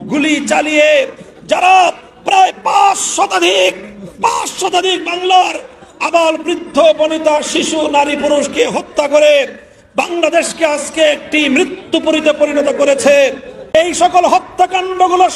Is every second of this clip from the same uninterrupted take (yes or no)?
no